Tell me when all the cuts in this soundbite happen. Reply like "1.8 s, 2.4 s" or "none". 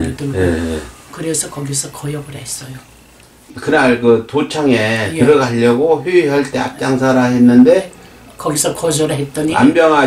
3.5 s